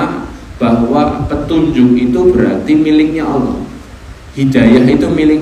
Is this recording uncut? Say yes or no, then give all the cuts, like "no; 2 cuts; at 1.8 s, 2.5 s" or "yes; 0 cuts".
yes; 0 cuts